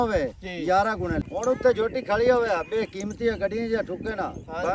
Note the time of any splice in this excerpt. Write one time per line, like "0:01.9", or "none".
0:01.3

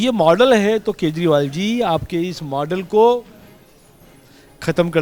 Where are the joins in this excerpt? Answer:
none

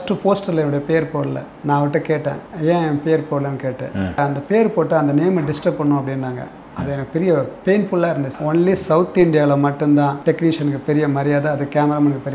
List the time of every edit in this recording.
0:01.5
0:02.5
0:04.2
0:08.4
0:10.2

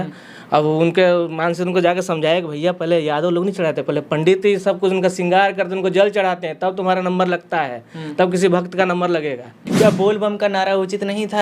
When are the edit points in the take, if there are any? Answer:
0:09.6

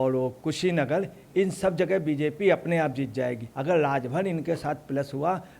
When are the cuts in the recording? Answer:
0:03.5

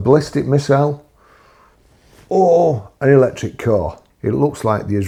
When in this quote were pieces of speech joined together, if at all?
none

